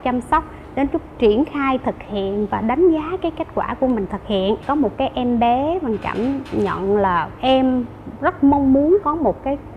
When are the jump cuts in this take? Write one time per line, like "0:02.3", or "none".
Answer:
0:04.6